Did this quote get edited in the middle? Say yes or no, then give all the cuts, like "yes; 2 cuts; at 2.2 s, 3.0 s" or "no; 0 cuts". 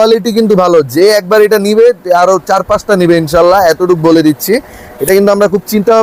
no; 0 cuts